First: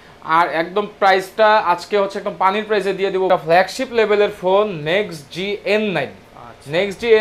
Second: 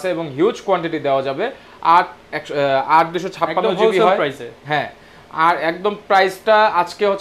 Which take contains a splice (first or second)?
first